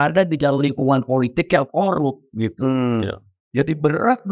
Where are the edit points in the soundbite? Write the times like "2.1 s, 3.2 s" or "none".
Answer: none